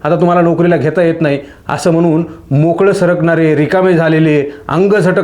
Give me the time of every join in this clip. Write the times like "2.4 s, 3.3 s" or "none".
none